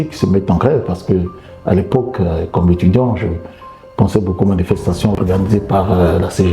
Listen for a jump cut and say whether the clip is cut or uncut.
cut